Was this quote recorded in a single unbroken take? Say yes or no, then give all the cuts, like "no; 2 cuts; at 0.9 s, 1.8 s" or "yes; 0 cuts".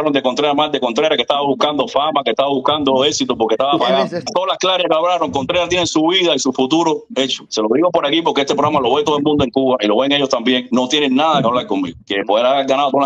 no; 3 cuts; at 4.3 s, 7.4 s, 12.0 s